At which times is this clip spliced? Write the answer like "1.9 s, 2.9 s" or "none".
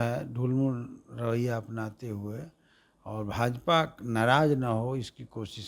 none